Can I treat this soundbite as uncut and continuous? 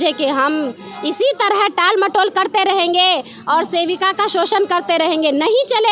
yes; 0 cuts

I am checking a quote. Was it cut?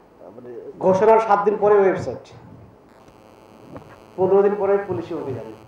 no; 0 cuts

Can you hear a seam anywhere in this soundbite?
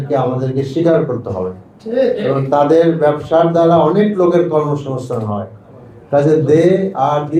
no; 0 cuts

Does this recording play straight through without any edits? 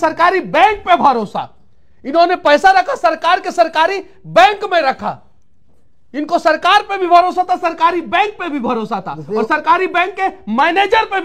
yes; 0 cuts

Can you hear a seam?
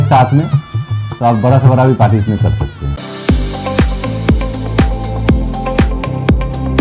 yes; 1 cut; at 2.9 s

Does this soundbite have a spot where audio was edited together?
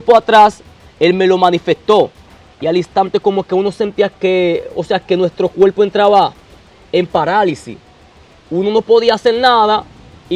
yes; 1 cut; at 2.3 s

